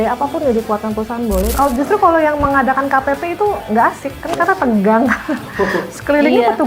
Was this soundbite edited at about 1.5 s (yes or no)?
yes